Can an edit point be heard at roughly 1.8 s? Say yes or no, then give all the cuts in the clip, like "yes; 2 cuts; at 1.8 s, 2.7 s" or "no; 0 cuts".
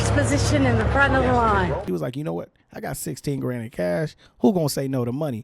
yes; 1 cut; at 1.8 s